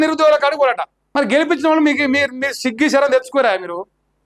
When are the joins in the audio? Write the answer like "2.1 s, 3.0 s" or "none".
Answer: 0.9 s